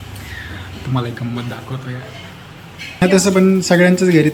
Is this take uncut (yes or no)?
no